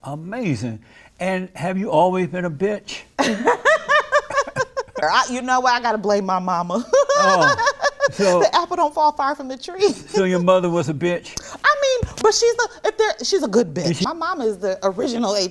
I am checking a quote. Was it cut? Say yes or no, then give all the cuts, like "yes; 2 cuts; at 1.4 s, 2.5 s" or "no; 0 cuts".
yes; 2 cuts; at 5.0 s, 14.0 s